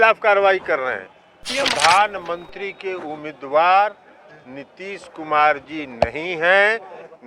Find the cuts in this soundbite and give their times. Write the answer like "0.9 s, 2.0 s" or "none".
1.5 s